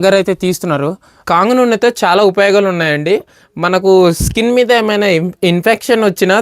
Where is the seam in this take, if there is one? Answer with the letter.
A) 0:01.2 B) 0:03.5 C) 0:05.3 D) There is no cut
A